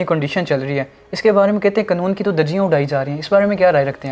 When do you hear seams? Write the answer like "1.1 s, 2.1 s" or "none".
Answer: none